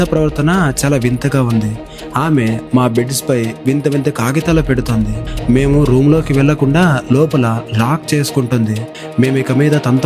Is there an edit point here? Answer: no; 0 cuts

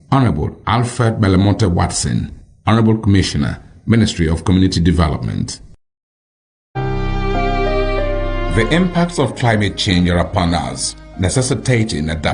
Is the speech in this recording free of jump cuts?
no; 1 cut; at 6.8 s

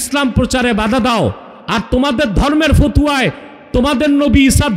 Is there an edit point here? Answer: no; 0 cuts

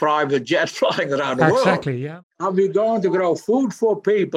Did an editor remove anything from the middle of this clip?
yes; 1 cut; at 2.2 s

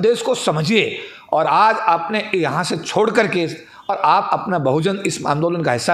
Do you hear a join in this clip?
no; 0 cuts

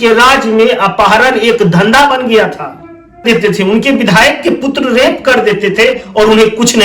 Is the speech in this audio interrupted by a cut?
yes; 1 cut; at 3.2 s

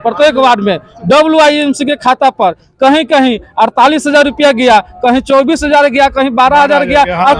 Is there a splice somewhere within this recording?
no; 0 cuts

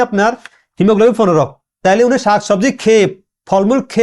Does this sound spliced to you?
yes; 1 cut; at 1.8 s

